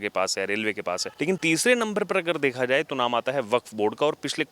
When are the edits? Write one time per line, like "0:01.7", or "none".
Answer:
0:01.4

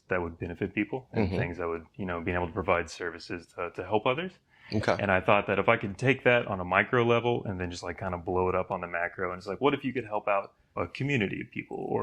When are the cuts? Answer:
none

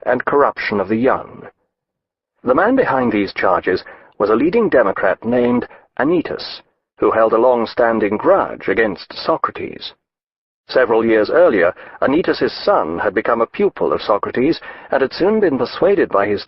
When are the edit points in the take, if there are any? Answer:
0:08.3

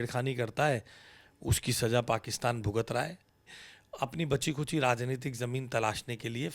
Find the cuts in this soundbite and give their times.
0:03.6

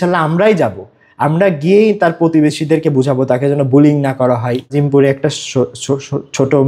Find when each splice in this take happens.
0:04.7

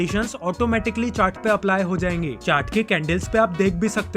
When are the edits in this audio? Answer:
none

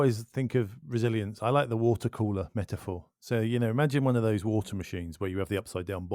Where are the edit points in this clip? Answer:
none

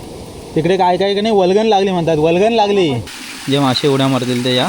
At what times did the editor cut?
0:03.1

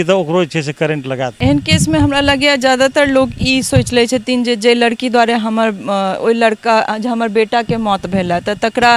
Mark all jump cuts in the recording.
0:01.3

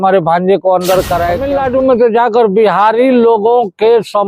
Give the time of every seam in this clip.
0:01.4

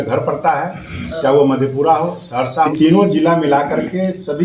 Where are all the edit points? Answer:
0:02.7

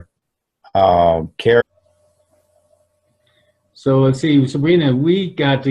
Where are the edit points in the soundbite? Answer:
none

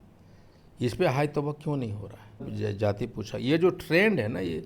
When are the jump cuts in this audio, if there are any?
0:02.5

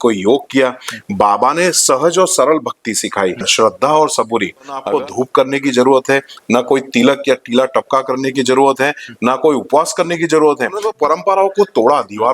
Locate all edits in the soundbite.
0:03.5
0:04.8
0:10.9

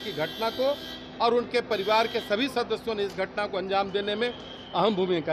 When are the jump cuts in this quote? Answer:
none

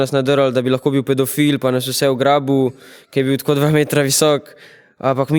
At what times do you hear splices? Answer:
none

